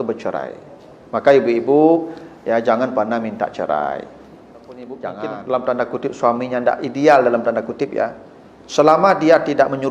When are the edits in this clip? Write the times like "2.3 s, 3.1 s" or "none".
5.1 s